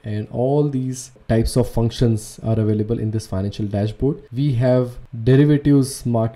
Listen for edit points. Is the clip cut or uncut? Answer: cut